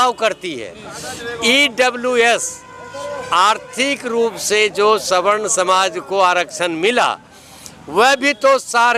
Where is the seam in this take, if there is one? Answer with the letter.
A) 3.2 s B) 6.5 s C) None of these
C